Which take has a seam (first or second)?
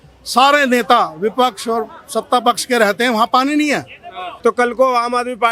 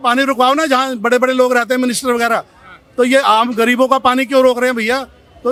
first